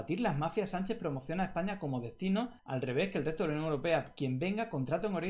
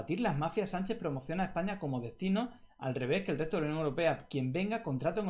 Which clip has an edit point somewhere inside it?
first; 1 cut; at 2.6 s

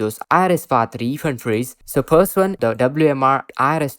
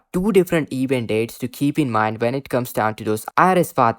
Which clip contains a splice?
first; 1 cut; at 2.6 s

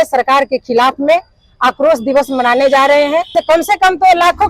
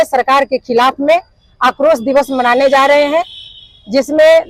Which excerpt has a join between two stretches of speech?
first; 1 cut; at 3.3 s

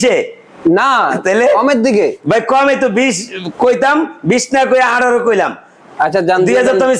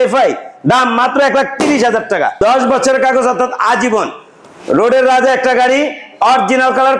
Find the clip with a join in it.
second; 1 cut; at 2.4 s

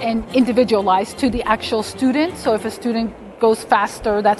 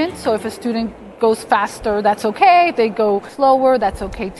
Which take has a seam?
second; 1 cut; at 3.3 s

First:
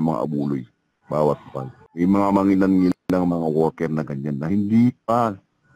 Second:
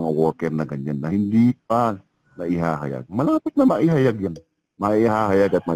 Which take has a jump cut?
first; 1 cut; at 1.8 s

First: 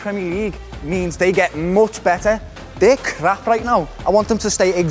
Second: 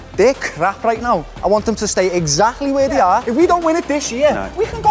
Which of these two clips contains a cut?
second; 1 cut; at 3.3 s

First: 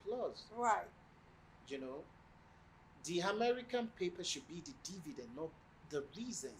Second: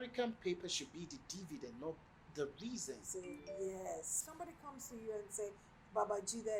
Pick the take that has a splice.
second; 1 cut; at 4.2 s

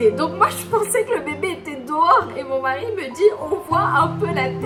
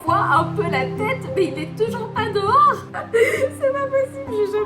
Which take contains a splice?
second; 1 cut; at 2.9 s

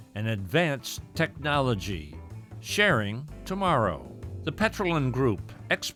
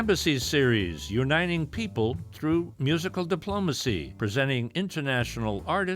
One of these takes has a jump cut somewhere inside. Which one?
second; 1 cut; at 4.1 s

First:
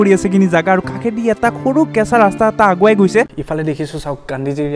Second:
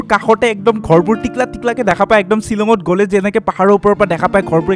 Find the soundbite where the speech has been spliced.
first; 1 cut; at 3.4 s

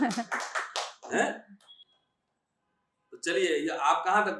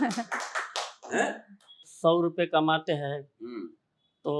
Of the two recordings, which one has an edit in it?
second; 1 cut; at 1.9 s

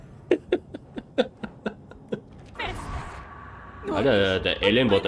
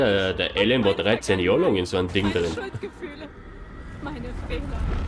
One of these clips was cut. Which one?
first; 1 cut; at 2.5 s

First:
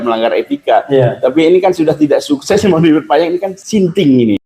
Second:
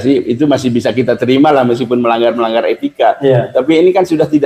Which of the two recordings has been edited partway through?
first; 1 cut; at 3.6 s

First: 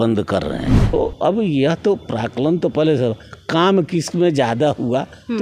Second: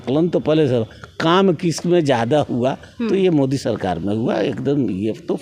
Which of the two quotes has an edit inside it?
first; 1 cut; at 0.9 s

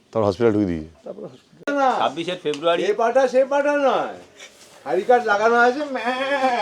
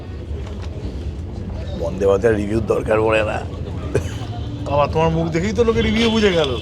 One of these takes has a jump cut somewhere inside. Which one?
first; 1 cut; at 1.7 s

